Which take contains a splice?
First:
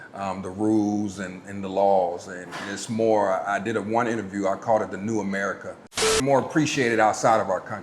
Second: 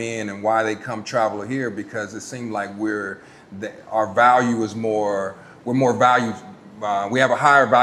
first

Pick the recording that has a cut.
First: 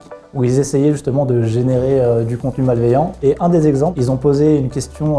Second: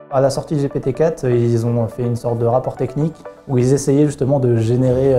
first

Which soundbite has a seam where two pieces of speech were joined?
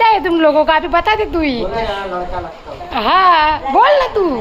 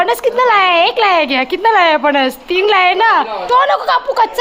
second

